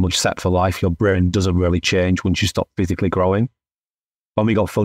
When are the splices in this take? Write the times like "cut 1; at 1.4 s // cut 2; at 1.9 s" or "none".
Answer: none